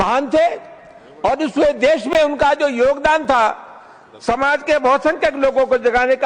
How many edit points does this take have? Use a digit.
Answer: 0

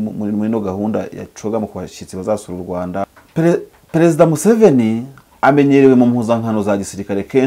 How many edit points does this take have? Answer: 1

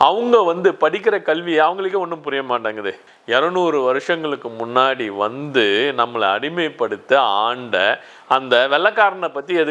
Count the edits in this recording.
1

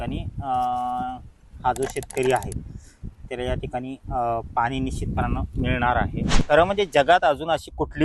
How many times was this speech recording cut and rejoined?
1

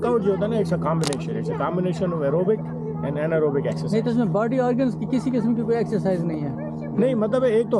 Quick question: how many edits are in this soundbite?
0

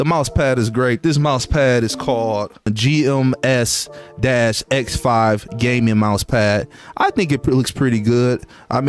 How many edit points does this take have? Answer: 0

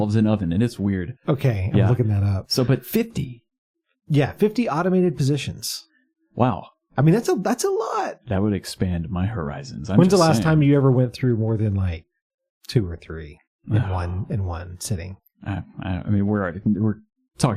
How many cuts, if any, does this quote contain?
0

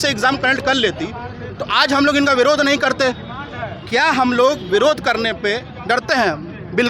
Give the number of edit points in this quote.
0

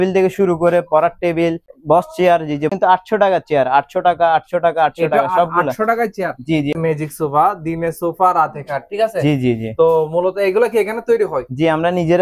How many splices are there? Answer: 3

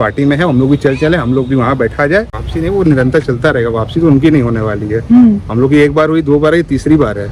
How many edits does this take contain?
1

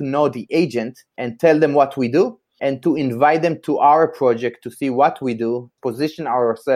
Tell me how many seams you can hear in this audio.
1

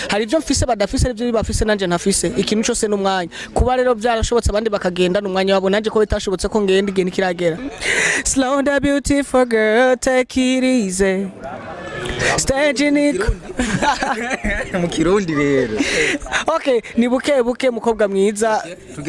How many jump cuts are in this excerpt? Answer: 1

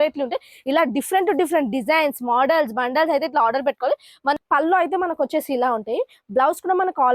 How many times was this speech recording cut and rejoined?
1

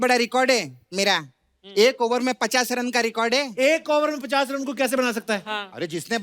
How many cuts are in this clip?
0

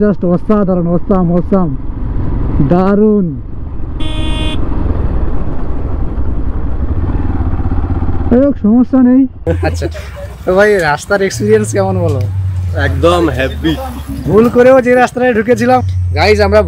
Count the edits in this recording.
1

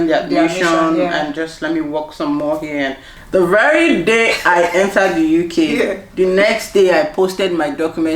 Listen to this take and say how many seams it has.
1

